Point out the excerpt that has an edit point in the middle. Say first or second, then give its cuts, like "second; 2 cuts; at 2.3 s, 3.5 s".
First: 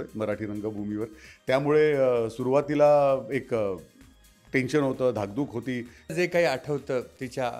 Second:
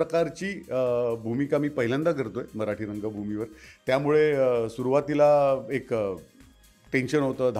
first; 1 cut; at 6.1 s